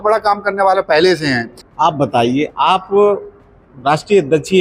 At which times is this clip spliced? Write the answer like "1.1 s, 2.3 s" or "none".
1.5 s